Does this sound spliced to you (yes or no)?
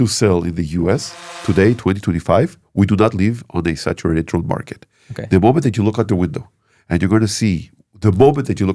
yes